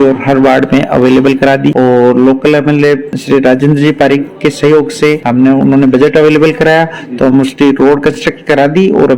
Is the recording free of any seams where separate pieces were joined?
no; 1 cut; at 1.8 s

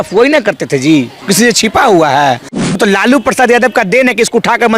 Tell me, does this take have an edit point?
yes; 1 cut; at 2.6 s

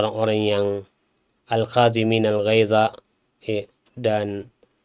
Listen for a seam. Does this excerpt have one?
no; 0 cuts

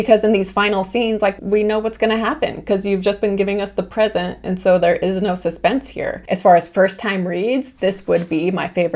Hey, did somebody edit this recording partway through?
yes; 1 cut; at 6.2 s

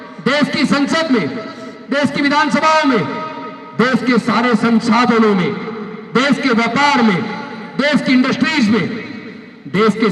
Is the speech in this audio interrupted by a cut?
no; 0 cuts

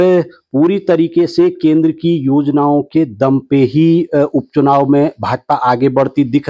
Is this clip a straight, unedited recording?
yes; 0 cuts

